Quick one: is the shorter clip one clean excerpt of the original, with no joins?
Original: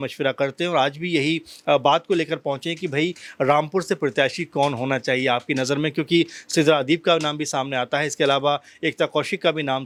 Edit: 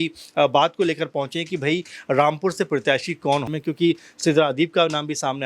no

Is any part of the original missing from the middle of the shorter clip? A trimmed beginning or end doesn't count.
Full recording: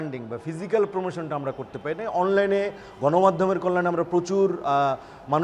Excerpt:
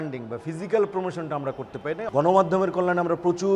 yes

